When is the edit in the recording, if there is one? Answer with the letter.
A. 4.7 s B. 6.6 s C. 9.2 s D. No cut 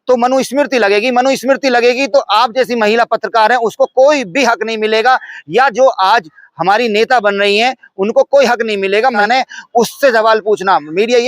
C